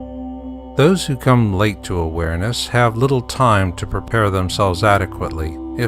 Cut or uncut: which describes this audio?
cut